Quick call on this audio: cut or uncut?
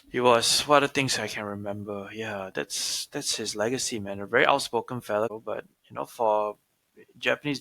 cut